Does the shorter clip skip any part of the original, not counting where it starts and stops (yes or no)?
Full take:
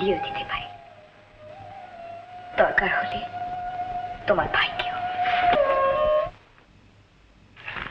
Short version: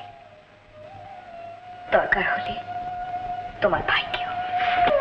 no